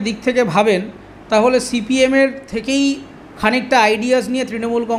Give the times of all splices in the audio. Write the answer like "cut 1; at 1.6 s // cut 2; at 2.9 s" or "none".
none